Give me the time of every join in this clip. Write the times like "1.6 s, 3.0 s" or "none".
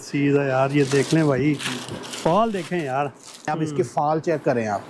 3.5 s